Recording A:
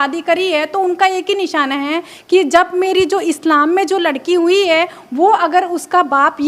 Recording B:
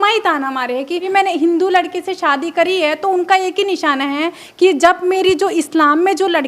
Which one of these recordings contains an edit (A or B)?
B